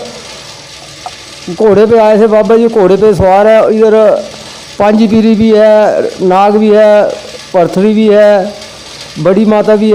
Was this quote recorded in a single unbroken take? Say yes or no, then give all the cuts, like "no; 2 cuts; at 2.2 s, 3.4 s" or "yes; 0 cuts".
yes; 0 cuts